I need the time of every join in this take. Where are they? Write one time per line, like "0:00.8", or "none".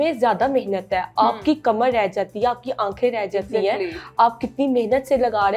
none